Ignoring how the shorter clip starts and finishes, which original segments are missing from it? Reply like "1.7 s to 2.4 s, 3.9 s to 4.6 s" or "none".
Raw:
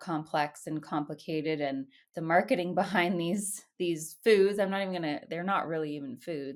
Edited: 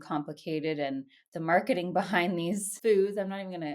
3.5 s to 4.1 s